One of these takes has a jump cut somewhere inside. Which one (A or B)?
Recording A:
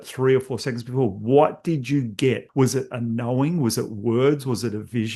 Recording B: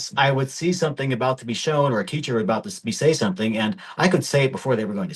A